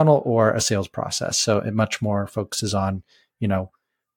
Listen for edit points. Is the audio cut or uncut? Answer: uncut